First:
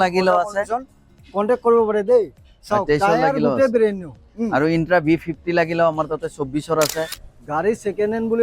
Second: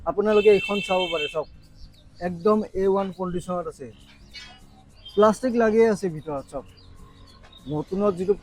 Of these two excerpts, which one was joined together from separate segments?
first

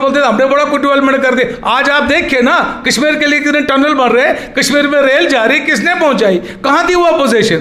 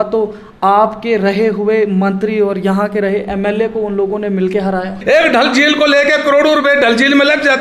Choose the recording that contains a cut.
second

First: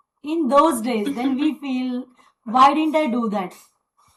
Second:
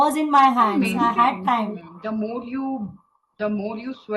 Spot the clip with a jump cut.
second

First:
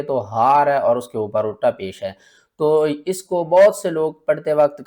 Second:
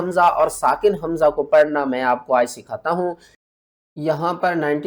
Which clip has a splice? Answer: second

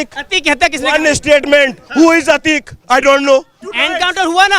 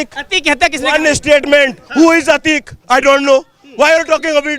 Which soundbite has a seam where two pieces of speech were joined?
first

